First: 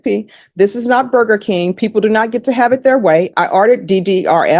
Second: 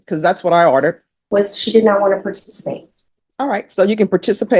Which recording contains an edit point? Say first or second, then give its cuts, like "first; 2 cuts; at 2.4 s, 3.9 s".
second; 1 cut; at 1.1 s